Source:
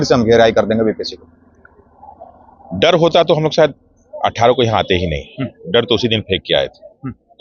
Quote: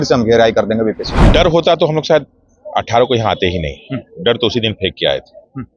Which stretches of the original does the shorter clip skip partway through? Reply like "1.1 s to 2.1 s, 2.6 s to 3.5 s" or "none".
1.1 s to 2.6 s